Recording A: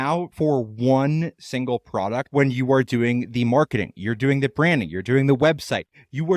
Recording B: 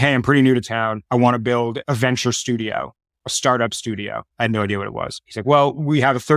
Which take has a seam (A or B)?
A